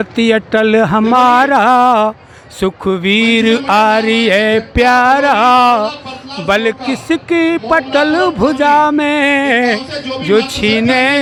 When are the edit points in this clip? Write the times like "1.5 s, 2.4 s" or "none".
none